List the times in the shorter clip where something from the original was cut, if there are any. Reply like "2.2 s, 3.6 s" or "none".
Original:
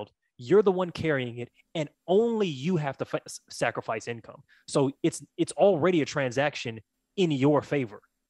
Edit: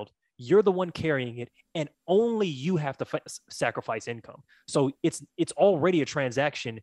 none